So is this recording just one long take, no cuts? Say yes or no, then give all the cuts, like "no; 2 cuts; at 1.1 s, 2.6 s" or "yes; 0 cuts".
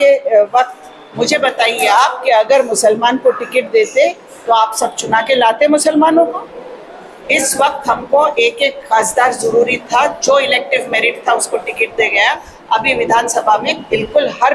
yes; 0 cuts